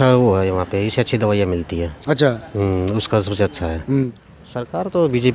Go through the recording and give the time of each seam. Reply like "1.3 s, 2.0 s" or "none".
4.1 s